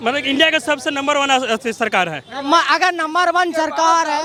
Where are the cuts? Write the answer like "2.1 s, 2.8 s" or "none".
none